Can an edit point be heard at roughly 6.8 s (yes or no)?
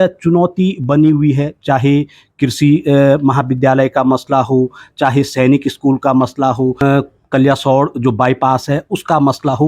yes